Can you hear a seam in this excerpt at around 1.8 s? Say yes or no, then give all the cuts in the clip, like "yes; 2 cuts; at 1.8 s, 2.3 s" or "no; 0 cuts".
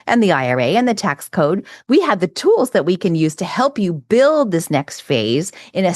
yes; 1 cut; at 1.8 s